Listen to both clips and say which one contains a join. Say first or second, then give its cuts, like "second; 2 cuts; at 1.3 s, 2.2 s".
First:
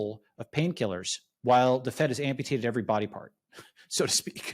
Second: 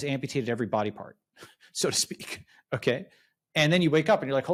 first; 1 cut; at 1.2 s